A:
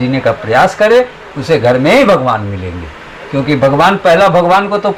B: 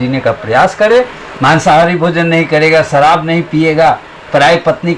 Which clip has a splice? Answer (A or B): B